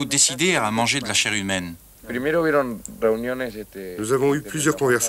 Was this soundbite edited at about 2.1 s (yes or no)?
yes